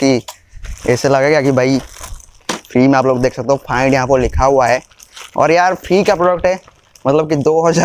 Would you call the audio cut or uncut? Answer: uncut